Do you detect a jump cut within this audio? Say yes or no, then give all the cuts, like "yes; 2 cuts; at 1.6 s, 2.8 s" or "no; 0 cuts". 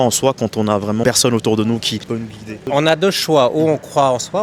no; 0 cuts